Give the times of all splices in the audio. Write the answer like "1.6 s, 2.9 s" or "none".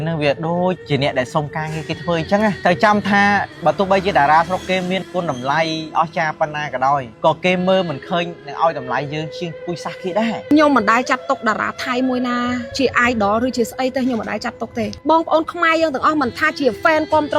2.6 s, 5.0 s, 10.5 s, 15.0 s